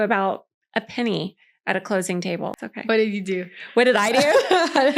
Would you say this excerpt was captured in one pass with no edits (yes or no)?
no